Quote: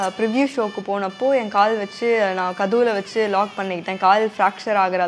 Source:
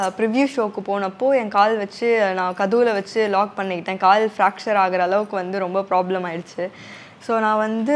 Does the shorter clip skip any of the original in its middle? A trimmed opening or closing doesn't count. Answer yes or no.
no